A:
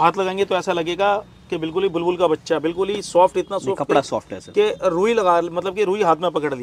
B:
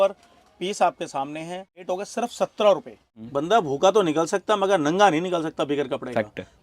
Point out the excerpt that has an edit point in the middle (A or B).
B